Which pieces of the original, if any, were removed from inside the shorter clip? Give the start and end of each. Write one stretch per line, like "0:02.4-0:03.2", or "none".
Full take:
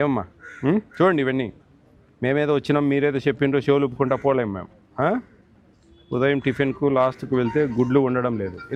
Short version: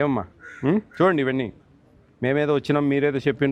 none